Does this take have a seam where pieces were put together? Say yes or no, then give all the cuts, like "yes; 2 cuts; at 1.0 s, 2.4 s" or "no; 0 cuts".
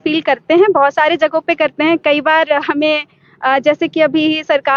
no; 0 cuts